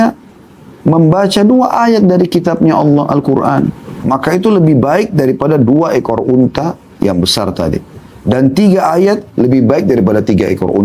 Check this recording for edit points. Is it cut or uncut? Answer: cut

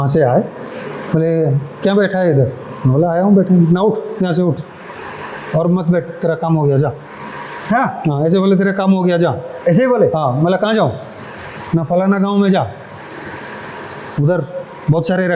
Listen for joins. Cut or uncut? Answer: uncut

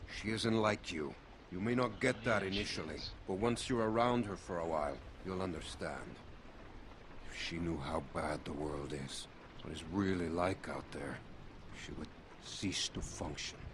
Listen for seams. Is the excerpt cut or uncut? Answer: uncut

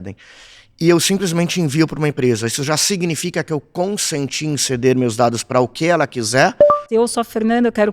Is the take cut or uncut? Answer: cut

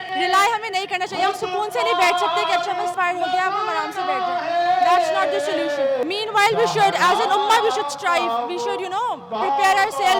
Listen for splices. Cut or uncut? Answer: uncut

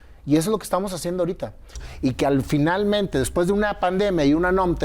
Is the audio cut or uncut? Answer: cut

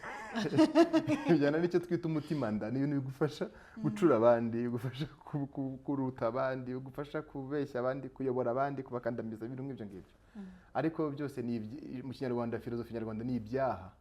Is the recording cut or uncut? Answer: uncut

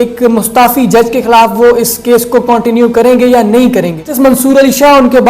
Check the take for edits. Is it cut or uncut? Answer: cut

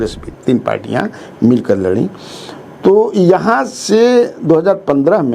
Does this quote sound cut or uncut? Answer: uncut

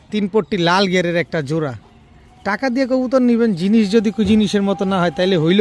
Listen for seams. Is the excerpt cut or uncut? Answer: uncut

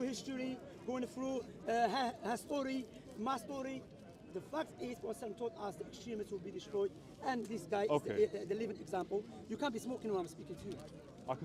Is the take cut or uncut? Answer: uncut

